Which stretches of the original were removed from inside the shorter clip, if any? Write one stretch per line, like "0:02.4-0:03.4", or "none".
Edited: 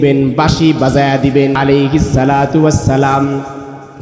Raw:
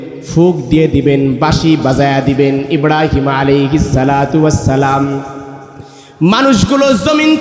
0:02.6-0:03.4